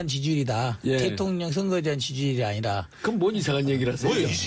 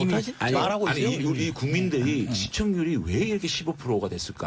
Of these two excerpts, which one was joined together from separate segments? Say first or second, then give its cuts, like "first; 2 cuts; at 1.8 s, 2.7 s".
first; 1 cut; at 2.2 s